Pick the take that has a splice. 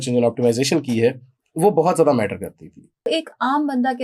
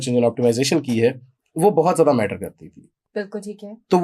first; 1 cut; at 3.0 s

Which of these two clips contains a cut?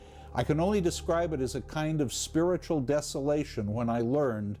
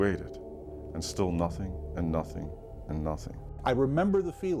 second; 1 cut; at 3.5 s

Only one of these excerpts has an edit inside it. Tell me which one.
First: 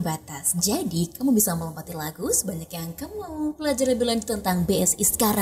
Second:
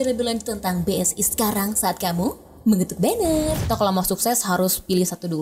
second; 1 cut; at 3.6 s

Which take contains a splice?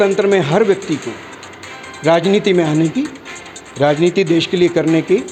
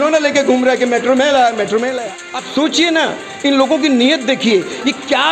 second; 1 cut; at 2.0 s

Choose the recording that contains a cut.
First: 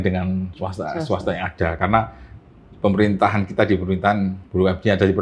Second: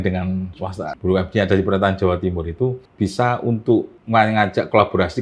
second; 3 cuts; at 0.9 s, 2.8 s, 4.0 s

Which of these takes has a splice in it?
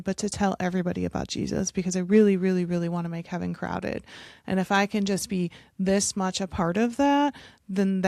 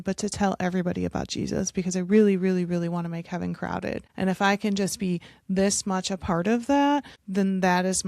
second; 2 cuts; at 4.1 s, 7.2 s

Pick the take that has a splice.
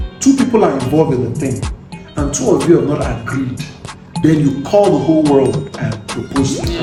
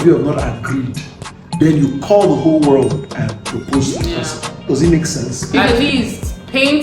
second; 1 cut; at 5.6 s

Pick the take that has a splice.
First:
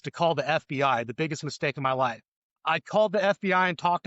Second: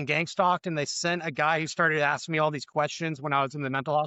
first; 1 cut; at 2.5 s

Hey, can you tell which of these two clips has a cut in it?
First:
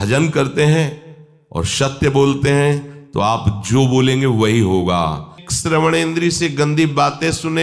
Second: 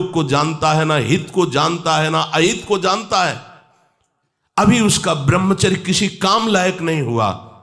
first; 1 cut; at 5.4 s

